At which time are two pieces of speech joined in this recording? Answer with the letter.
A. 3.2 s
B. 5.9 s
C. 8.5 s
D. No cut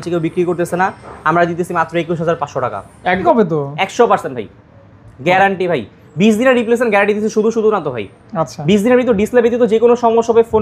A